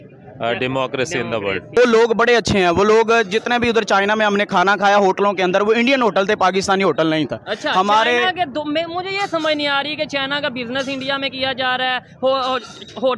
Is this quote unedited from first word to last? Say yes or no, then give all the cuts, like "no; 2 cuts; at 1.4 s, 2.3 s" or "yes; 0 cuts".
no; 1 cut; at 1.8 s